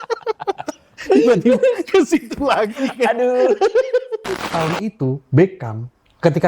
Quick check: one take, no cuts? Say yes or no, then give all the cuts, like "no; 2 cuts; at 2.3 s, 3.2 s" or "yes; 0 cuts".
no; 1 cut; at 4.5 s